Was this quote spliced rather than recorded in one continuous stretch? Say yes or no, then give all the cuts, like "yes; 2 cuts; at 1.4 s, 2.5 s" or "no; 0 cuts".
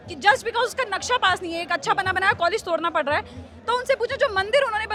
no; 0 cuts